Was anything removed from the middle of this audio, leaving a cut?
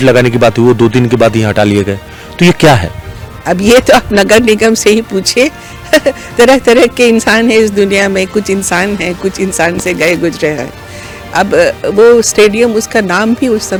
no; 0 cuts

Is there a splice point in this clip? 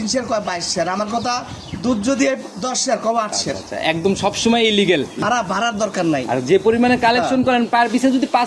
yes; 1 cut; at 5.2 s

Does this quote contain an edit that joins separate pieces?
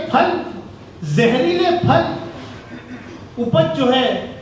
no; 0 cuts

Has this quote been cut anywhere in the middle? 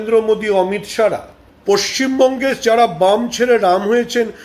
yes; 1 cut; at 1.5 s

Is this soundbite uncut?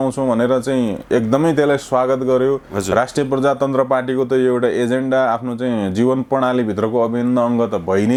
yes; 0 cuts

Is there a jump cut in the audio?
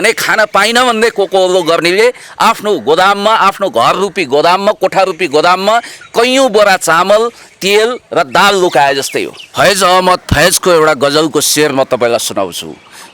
yes; 1 cut; at 9.5 s

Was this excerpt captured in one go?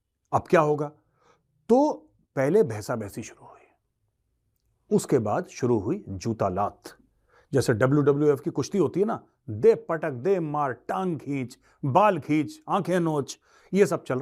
yes; 0 cuts

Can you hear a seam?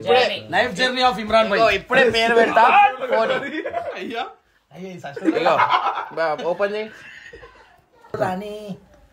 yes; 1 cut; at 8.2 s

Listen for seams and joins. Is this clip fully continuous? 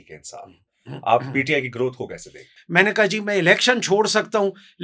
no; 1 cut; at 2.5 s

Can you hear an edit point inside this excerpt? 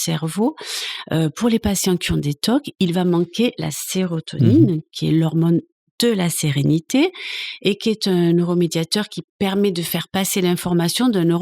no; 0 cuts

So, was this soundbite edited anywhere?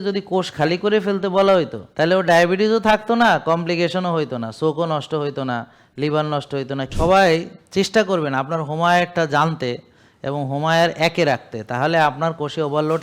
yes; 2 cuts; at 1.8 s, 6.9 s

